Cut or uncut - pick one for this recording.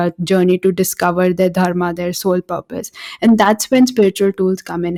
uncut